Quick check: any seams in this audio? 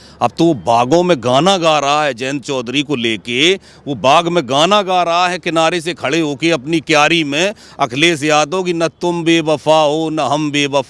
no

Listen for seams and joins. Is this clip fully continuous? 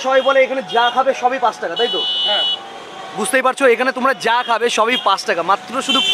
yes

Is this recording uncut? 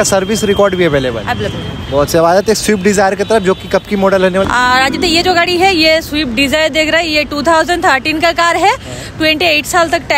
yes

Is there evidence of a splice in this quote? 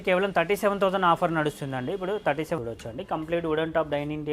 yes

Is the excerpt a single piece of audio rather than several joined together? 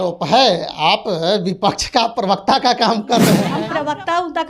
no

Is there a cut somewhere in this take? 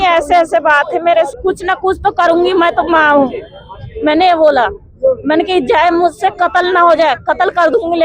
yes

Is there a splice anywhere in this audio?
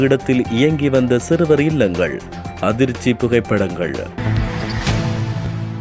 yes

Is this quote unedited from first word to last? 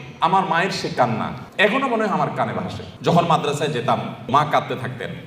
no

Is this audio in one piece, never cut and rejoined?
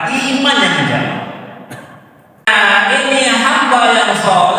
no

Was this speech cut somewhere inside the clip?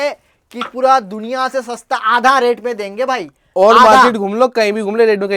no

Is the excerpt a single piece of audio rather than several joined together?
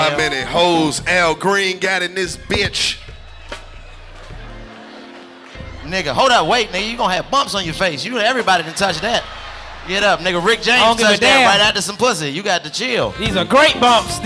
yes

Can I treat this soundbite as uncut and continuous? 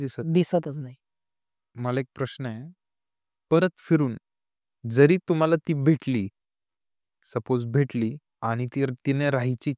no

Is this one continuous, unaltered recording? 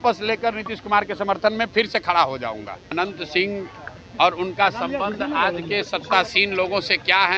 no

